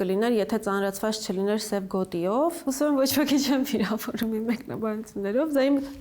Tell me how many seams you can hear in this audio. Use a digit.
1